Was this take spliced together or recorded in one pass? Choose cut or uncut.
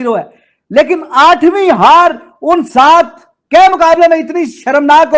uncut